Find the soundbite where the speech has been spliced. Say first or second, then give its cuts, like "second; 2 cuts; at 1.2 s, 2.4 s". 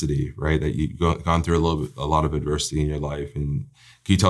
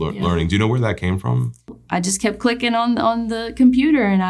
second; 1 cut; at 1.8 s